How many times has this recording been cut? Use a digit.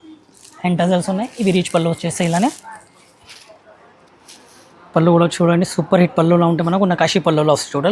0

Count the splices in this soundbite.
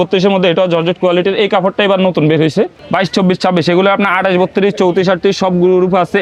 1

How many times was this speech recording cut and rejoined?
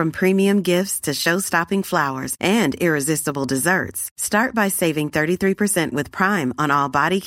0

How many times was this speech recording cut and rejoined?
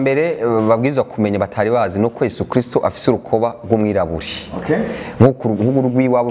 0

